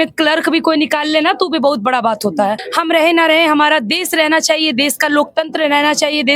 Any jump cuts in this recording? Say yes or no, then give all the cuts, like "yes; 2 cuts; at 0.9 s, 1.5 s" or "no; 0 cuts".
yes; 1 cut; at 2.7 s